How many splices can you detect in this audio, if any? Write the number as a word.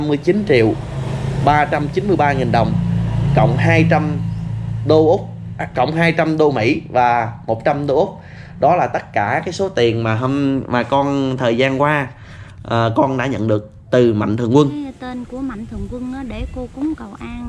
one